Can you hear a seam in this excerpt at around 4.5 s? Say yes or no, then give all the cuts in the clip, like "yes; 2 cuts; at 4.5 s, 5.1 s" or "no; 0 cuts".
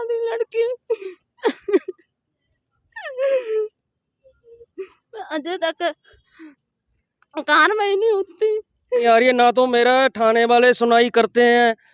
no; 1 cut; at 9.0 s